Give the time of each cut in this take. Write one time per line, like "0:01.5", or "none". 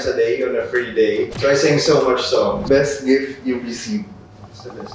0:02.6